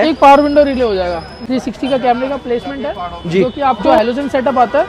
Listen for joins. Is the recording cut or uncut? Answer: cut